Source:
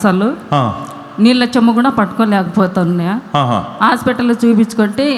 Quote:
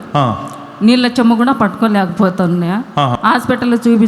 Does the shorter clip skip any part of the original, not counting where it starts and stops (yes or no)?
yes